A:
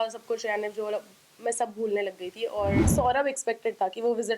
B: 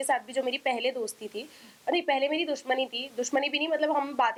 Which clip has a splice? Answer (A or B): A